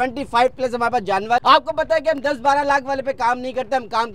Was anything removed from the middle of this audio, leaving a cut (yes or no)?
yes